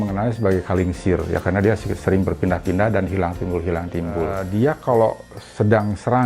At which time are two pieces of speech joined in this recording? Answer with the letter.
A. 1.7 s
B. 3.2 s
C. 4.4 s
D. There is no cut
C